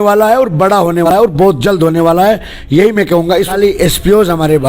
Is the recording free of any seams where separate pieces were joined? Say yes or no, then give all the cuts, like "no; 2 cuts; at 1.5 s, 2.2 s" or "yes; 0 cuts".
no; 2 cuts; at 1.1 s, 3.5 s